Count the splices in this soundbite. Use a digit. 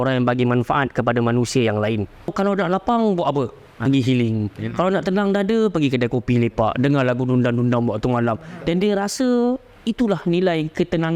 1